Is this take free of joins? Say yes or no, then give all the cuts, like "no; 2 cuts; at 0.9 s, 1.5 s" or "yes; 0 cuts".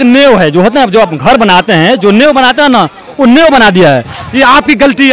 no; 1 cut; at 4.2 s